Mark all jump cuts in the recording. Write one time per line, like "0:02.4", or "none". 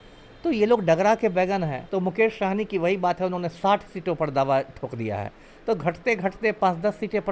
0:01.8